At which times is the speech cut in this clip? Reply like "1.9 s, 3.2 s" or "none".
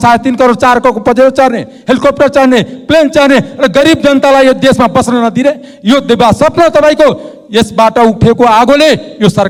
none